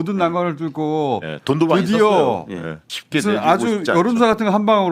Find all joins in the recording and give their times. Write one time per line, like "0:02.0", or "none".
0:02.8